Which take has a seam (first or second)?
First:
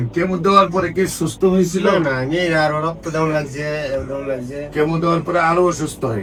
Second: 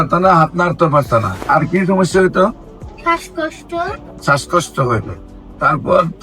second